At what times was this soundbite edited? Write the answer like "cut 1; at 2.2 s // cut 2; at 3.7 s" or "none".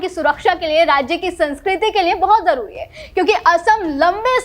none